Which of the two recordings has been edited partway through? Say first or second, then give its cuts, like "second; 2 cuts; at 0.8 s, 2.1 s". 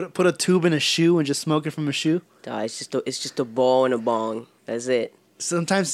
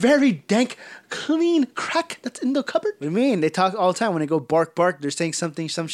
second; 1 cut; at 3.0 s